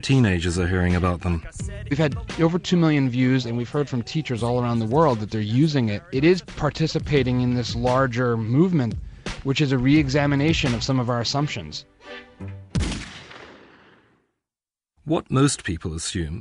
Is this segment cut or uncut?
uncut